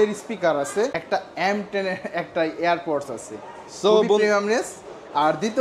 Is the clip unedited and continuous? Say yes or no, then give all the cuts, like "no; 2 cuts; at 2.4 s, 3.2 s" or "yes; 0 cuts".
yes; 0 cuts